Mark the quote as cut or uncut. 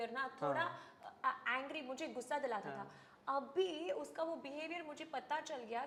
uncut